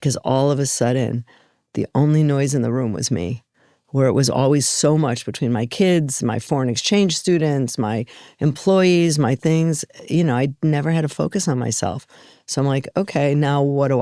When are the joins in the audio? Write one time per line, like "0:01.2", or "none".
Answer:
none